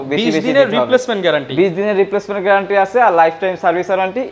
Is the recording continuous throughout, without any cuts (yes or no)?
yes